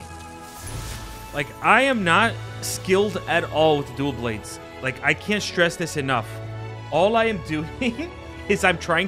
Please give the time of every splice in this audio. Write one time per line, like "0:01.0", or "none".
none